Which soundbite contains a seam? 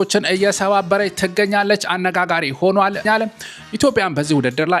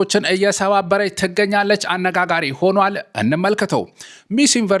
first; 1 cut; at 3.0 s

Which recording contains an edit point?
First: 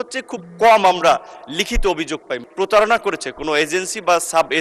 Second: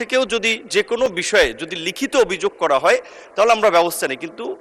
first; 1 cut; at 2.3 s

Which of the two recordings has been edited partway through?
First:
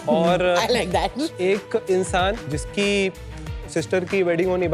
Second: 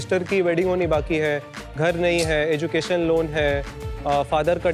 first; 2 cuts; at 1.3 s, 2.5 s

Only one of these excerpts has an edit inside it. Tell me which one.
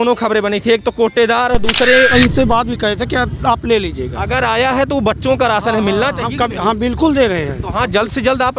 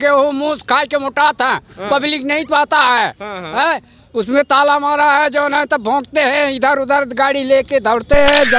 first; 1 cut; at 2.1 s

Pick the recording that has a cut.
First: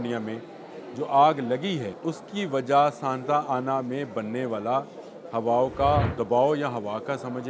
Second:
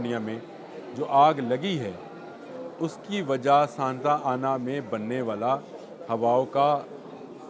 first; 2 cuts; at 1.9 s, 6.1 s

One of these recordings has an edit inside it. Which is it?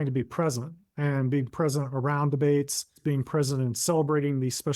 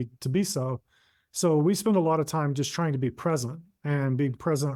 first; 1 cut; at 3.0 s

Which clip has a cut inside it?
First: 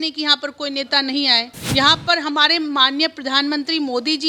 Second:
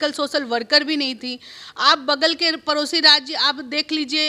first; 1 cut; at 1.6 s

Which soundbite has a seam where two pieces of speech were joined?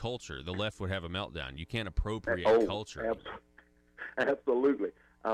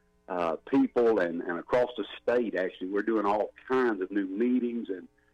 first; 1 cut; at 3.2 s

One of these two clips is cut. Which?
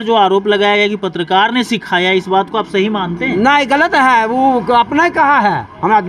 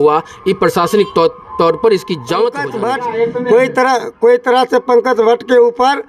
second; 1 cut; at 2.7 s

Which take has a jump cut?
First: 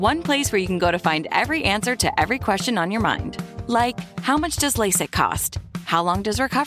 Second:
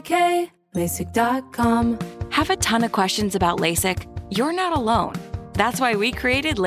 second; 1 cut; at 1.9 s

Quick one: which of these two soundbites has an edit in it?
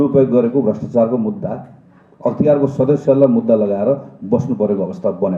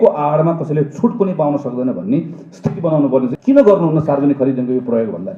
second; 1 cut; at 3.3 s

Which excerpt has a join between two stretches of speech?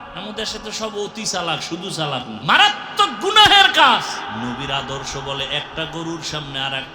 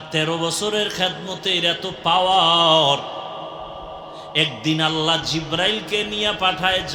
first; 2 cuts; at 2.4 s, 4.3 s

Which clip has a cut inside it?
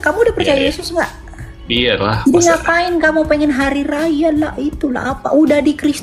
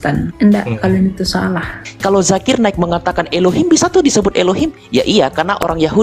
second; 1 cut; at 1.8 s

